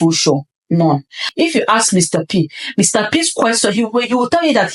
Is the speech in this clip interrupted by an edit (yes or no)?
yes